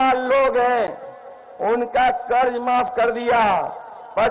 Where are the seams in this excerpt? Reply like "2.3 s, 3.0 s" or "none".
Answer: none